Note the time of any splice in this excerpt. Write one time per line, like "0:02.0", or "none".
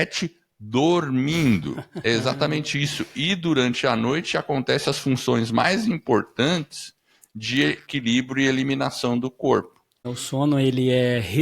0:10.2